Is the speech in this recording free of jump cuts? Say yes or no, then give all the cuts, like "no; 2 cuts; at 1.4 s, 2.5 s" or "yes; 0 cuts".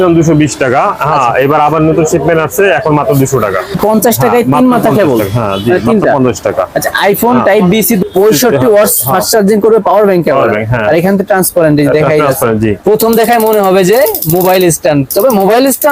no; 3 cuts; at 3.7 s, 8.0 s, 12.8 s